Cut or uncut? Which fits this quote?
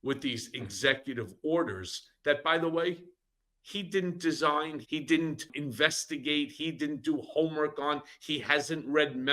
cut